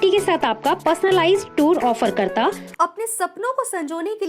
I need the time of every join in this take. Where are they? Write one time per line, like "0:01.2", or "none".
0:02.6

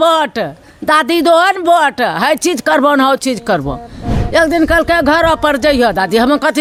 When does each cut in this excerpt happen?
none

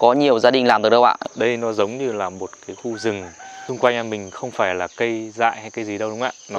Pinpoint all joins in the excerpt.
0:01.2
0:03.6

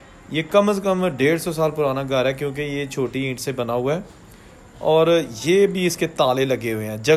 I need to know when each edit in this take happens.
none

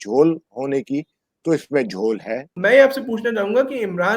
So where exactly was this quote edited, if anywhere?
0:02.5

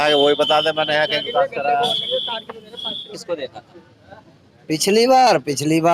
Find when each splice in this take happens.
0:03.2

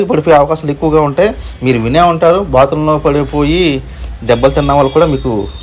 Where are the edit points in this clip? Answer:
none

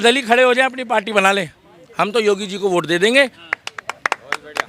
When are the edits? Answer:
0:03.4

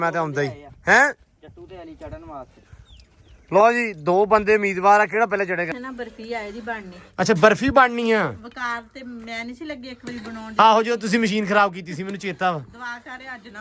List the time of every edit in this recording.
0:05.7

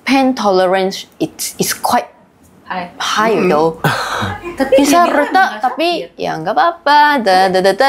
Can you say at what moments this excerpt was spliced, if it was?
none

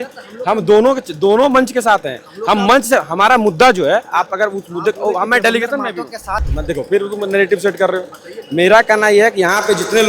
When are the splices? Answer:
0:06.5

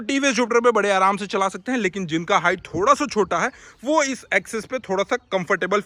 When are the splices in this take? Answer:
none

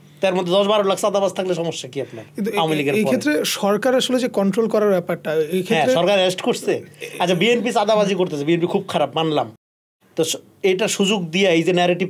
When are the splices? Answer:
none

